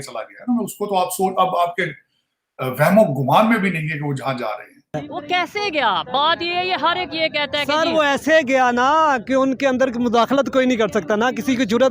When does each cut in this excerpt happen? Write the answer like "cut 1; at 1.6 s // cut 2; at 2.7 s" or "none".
cut 1; at 5.0 s

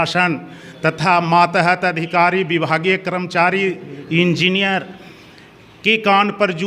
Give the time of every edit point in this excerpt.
none

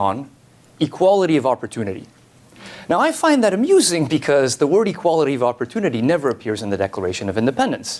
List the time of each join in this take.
cut 1; at 3.7 s

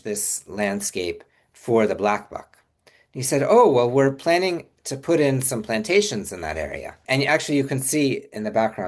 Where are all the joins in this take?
cut 1; at 7.0 s

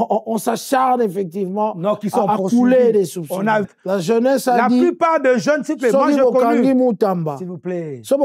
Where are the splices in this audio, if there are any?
cut 1; at 3.7 s

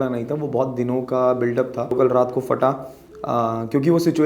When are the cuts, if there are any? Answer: cut 1; at 1.9 s

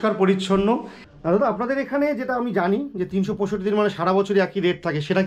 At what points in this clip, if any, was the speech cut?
cut 1; at 1.0 s

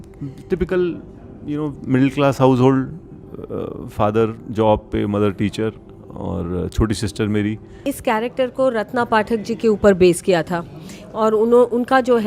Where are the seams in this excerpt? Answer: cut 1; at 7.8 s

